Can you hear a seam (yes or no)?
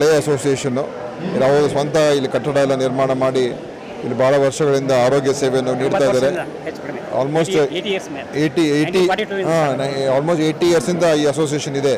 no